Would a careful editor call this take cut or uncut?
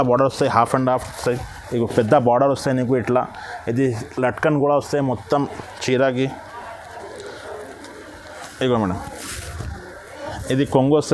uncut